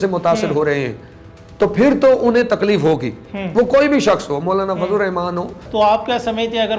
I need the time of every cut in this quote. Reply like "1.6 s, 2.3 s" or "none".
5.6 s